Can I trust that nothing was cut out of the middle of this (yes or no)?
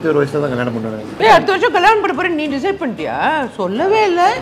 no